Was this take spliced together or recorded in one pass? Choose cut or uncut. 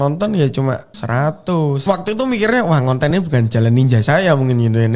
cut